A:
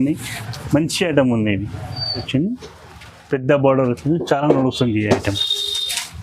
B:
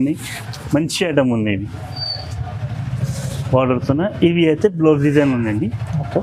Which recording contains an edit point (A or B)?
A